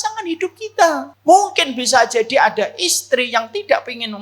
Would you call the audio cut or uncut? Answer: cut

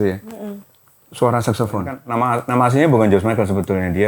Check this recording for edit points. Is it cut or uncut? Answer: cut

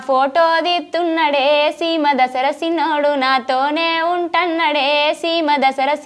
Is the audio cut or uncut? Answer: uncut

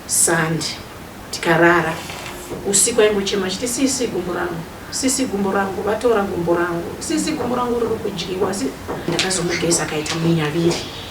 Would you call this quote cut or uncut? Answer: cut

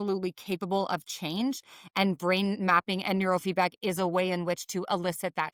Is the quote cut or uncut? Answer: uncut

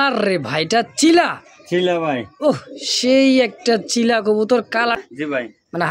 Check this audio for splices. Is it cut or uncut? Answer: cut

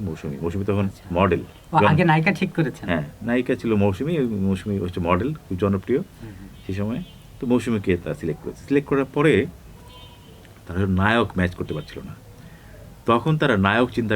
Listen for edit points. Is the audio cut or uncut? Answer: uncut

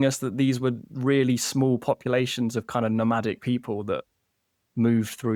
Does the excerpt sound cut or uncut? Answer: uncut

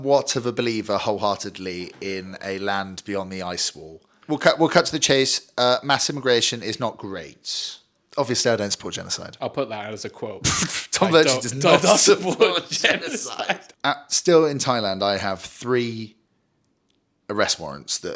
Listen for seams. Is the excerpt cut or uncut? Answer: cut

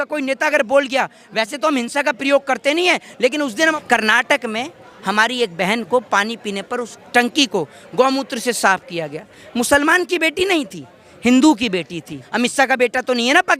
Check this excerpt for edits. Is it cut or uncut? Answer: cut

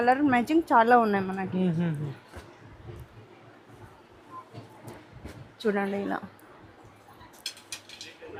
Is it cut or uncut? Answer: uncut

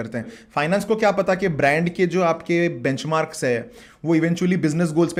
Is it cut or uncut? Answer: uncut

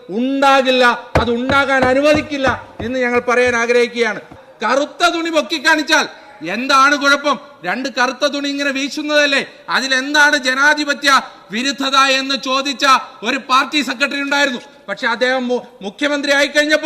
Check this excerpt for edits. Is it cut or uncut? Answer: cut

